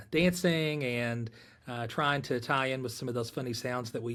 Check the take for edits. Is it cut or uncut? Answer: uncut